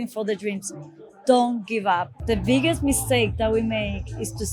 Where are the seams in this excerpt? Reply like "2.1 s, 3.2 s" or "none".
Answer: 2.2 s